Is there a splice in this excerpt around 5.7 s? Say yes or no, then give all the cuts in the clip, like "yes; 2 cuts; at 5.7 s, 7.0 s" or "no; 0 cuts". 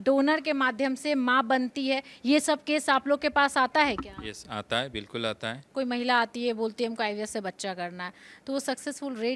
yes; 1 cut; at 5.7 s